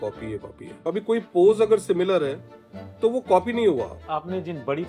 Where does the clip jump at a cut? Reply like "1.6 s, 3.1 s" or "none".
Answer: 0.9 s, 4.0 s